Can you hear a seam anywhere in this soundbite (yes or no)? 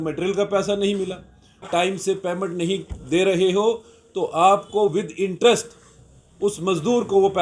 yes